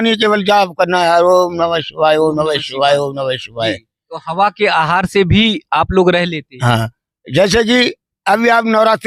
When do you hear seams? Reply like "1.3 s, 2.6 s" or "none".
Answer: none